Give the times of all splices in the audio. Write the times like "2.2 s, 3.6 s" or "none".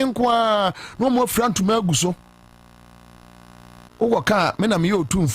3.8 s